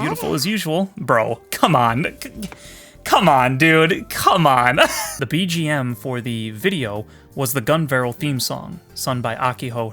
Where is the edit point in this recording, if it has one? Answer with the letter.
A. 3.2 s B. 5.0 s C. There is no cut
B